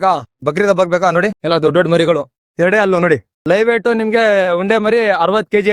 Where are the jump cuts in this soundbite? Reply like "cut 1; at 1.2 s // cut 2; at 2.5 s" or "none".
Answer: cut 1; at 1.4 s // cut 2; at 2.4 s // cut 3; at 3.3 s